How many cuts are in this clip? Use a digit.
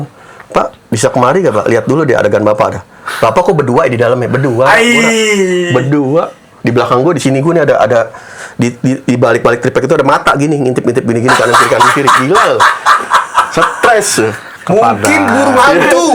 0